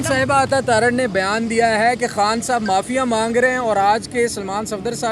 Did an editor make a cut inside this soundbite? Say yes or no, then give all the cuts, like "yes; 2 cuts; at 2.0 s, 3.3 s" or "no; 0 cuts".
no; 0 cuts